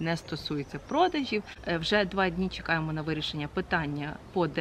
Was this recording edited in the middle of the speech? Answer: yes; 1 cut; at 1.9 s

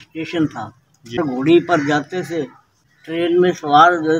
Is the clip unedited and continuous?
no; 2 cuts; at 1.2 s, 2.7 s

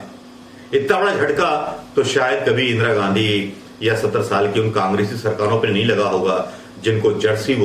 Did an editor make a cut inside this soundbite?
no; 0 cuts

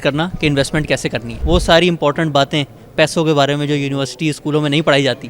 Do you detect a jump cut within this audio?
yes; 1 cut; at 1.3 s

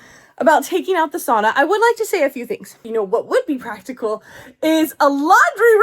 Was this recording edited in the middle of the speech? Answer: yes; 1 cut; at 2.9 s

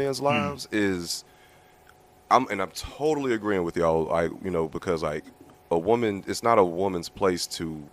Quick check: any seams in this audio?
no; 0 cuts

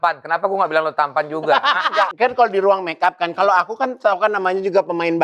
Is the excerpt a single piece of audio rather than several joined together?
no; 1 cut; at 2.1 s

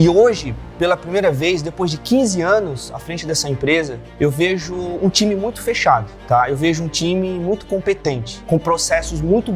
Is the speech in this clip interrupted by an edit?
yes; 3 cuts; at 4.0 s, 6.1 s, 8.3 s

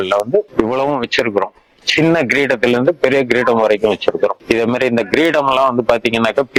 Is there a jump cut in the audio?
no; 0 cuts

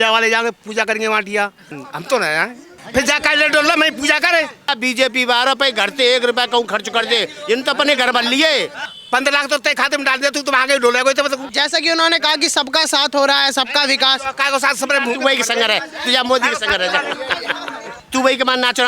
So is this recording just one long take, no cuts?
no; 6 cuts; at 1.7 s, 2.7 s, 4.7 s, 8.8 s, 11.5 s, 18.0 s

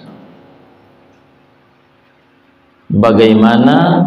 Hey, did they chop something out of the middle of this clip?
no; 0 cuts

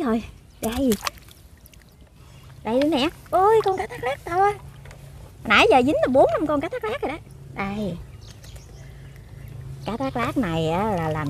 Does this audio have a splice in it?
yes; 1 cut; at 2.1 s

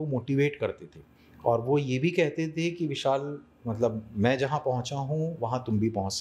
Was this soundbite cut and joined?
no; 0 cuts

